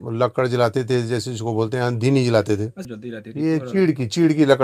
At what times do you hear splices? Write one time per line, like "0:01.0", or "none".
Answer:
0:02.8